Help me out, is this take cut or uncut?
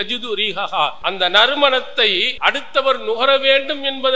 cut